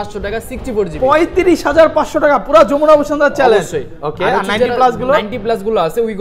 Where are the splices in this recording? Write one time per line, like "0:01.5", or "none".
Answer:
none